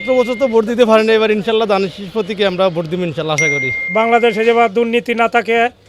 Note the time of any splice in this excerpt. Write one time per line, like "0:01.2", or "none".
0:03.8